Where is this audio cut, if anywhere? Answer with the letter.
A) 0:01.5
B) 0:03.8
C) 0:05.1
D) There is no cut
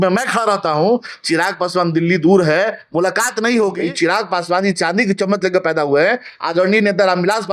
B